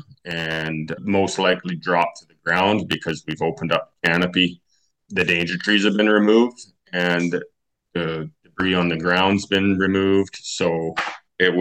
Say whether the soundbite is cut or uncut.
uncut